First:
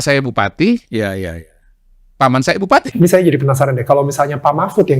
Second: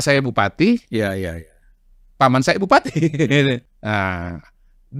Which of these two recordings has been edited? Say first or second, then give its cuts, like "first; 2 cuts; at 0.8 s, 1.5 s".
first; 1 cut; at 2.9 s